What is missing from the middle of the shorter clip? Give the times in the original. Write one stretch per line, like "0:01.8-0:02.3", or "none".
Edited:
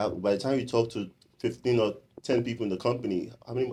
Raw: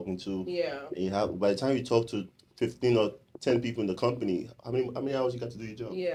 none